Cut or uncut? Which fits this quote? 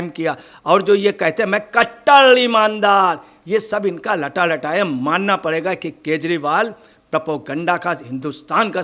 uncut